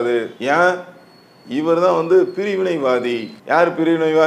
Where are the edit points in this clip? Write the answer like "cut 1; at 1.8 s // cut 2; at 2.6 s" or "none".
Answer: cut 1; at 3.3 s